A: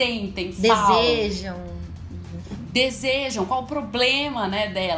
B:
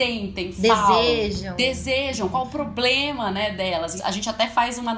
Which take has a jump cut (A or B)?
B